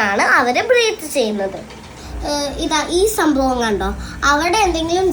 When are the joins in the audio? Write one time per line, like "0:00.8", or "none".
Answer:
0:01.9